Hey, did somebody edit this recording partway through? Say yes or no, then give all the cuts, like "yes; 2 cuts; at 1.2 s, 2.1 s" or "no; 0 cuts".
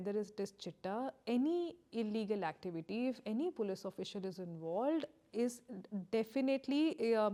no; 0 cuts